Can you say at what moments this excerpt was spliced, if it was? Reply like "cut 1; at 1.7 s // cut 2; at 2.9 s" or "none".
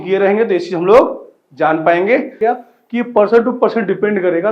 cut 1; at 2.4 s